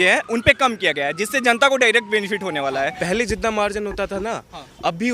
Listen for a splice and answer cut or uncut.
cut